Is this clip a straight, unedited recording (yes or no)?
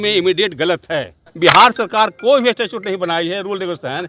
no